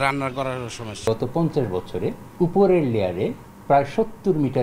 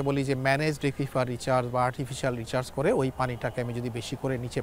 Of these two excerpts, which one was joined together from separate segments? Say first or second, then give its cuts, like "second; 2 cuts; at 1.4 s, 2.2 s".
first; 3 cuts; at 1.0 s, 2.2 s, 3.5 s